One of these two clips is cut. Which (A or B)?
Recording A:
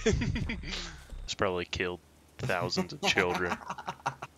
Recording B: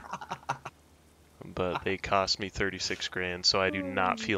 A